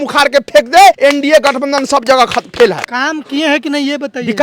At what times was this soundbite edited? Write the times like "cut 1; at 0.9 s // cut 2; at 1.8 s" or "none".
cut 1; at 1.0 s // cut 2; at 2.9 s